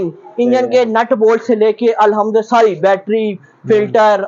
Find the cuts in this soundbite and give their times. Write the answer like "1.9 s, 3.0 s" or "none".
none